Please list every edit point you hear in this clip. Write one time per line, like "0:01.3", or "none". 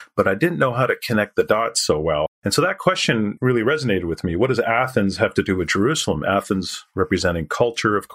0:02.3